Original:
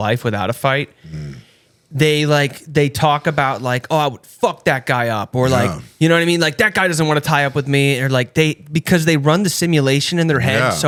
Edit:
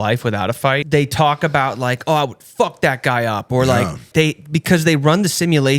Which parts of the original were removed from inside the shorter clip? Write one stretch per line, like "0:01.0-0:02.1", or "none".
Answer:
0:00.8-0:02.7
0:05.9-0:08.3